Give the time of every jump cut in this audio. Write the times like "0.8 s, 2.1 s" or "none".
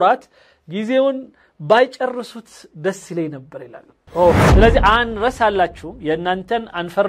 4.4 s